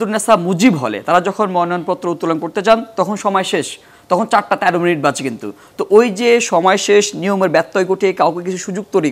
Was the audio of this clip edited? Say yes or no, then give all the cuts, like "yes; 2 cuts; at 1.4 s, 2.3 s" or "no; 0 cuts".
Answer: no; 0 cuts